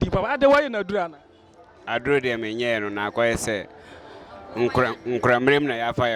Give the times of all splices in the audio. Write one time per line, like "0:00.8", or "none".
none

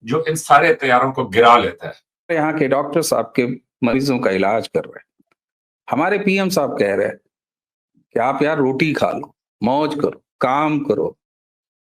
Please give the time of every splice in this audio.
0:02.3

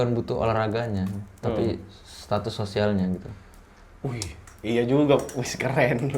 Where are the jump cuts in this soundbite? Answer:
none

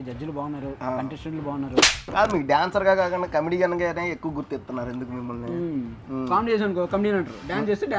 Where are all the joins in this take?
0:01.8
0:06.0

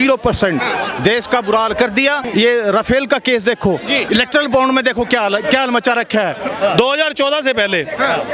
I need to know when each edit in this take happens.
0:02.2
0:04.1
0:06.5

